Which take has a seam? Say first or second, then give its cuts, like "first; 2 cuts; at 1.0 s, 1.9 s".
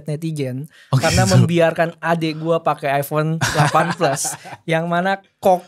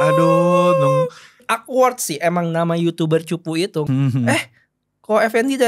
second; 2 cuts; at 1.4 s, 3.8 s